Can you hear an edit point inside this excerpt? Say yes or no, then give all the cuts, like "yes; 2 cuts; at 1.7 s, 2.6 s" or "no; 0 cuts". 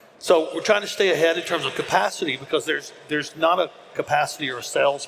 no; 0 cuts